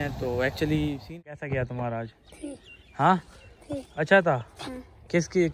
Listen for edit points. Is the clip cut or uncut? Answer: cut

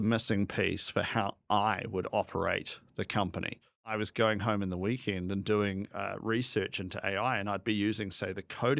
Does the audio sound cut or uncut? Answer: cut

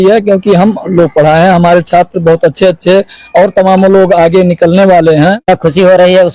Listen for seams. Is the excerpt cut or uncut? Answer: cut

